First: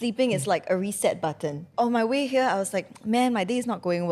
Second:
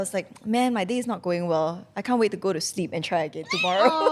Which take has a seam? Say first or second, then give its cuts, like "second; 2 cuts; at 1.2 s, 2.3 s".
first; 1 cut; at 1.7 s